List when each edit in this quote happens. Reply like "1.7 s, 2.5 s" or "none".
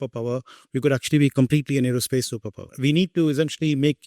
2.6 s